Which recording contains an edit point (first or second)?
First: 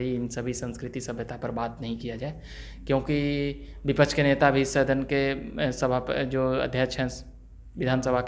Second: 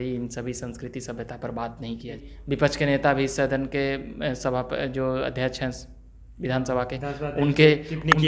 second